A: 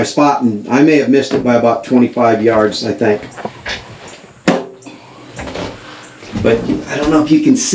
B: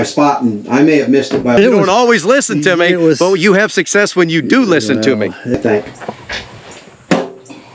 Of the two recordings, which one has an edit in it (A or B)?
B